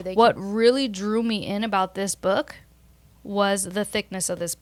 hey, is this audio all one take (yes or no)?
yes